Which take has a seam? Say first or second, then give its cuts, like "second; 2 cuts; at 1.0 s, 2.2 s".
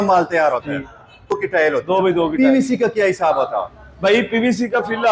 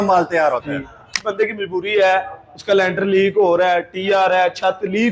second; 1 cut; at 1.1 s